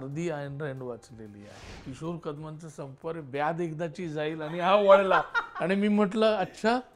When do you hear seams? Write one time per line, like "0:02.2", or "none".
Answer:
0:01.8